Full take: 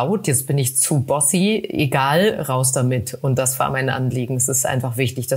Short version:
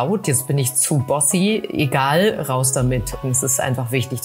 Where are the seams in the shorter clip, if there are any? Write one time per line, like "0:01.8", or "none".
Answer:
0:03.2